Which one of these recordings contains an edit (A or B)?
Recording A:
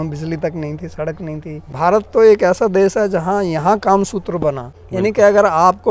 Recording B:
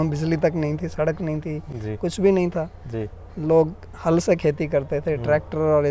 A